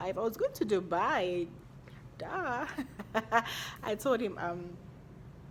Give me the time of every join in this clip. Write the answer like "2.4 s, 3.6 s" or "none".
none